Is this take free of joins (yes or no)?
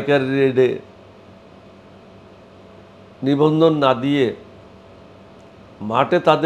yes